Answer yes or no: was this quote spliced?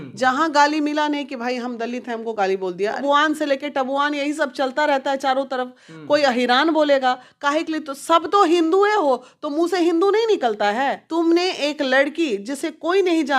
yes